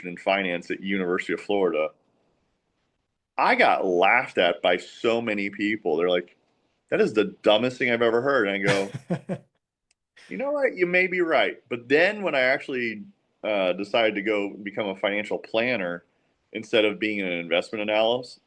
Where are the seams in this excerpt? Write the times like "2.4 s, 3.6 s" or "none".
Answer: none